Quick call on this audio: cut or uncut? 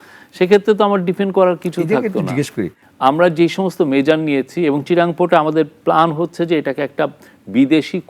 cut